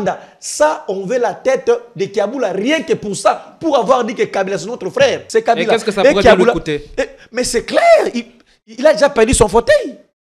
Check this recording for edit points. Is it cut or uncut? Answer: cut